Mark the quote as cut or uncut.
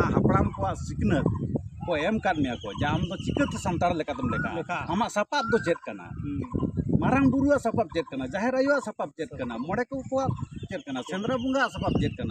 uncut